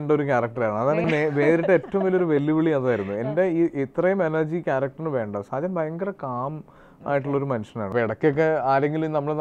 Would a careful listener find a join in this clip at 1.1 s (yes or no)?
yes